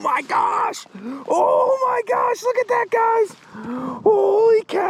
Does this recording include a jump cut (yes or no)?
no